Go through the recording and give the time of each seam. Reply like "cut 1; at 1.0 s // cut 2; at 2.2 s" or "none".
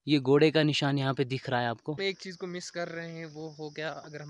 cut 1; at 2.0 s